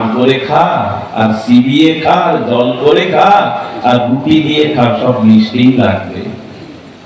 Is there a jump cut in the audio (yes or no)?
no